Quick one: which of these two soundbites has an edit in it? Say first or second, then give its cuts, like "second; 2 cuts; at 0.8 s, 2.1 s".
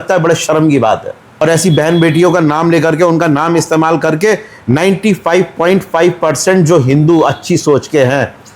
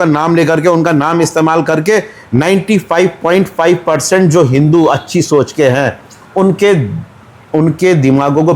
first; 1 cut; at 1.4 s